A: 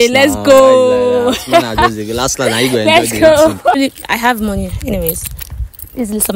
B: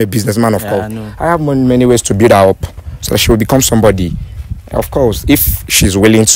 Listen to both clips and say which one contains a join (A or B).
A